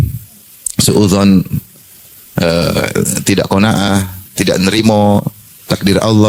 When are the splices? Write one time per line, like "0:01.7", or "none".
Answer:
none

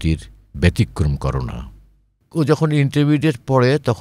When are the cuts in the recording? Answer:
0:02.1

